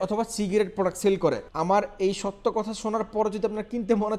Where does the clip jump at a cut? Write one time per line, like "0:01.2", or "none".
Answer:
0:01.5